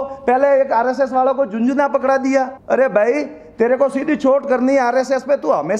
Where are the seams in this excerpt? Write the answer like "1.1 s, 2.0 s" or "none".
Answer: 2.6 s